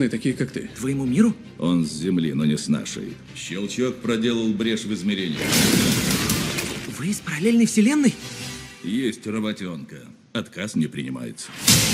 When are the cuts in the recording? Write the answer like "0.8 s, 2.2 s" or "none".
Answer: 5.7 s